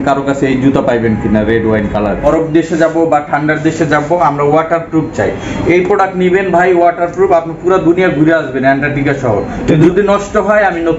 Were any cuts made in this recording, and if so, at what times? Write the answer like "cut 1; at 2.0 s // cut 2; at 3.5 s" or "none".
cut 1; at 2.2 s // cut 2; at 9.8 s